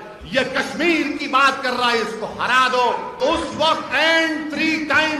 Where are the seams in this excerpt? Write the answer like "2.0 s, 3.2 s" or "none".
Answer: 3.2 s